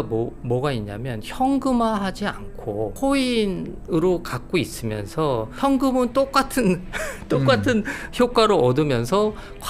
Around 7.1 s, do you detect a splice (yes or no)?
no